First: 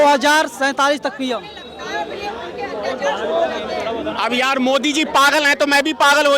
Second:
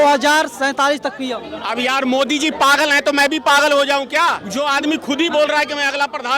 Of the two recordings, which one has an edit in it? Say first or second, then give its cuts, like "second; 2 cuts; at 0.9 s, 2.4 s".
second; 2 cuts; at 1.5 s, 4.4 s